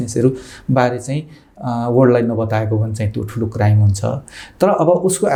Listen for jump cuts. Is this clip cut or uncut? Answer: uncut